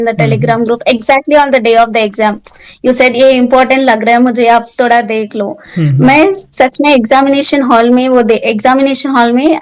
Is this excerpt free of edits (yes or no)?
yes